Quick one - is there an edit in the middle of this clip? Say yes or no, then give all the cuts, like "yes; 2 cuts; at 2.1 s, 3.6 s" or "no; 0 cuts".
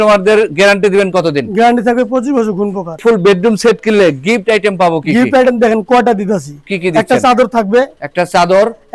yes; 1 cut; at 3.0 s